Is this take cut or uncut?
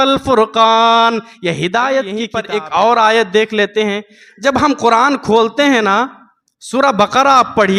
cut